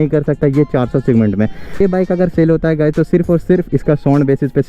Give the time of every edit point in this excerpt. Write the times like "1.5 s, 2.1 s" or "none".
1.8 s

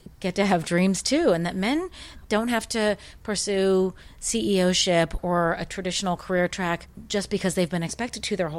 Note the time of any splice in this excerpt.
2.1 s, 5.2 s, 6.9 s

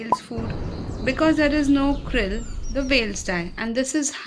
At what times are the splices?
none

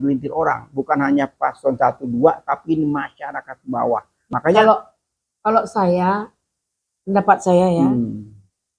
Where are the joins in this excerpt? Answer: 4.3 s

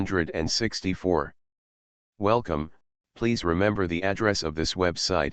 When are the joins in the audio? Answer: 1.1 s

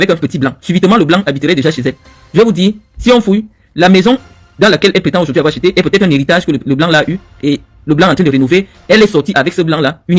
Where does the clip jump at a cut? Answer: none

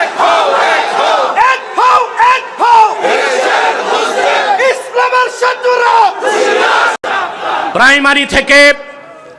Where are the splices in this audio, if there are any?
7.7 s

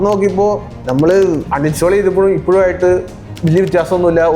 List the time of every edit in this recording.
1.4 s

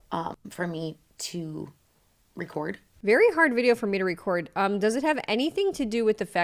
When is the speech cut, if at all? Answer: none

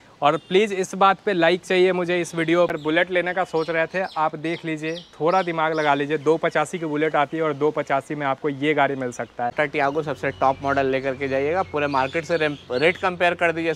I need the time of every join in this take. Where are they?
2.7 s, 9.5 s

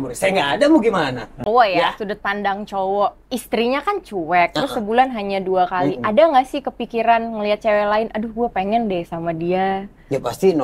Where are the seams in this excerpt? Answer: 1.4 s

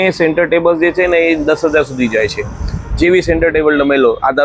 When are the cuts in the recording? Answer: none

